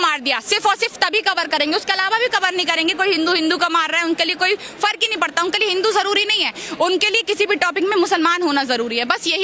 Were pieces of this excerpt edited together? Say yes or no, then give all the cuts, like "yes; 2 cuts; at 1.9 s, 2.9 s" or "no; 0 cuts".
no; 0 cuts